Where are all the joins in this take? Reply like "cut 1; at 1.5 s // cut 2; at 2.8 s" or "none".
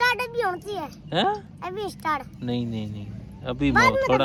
none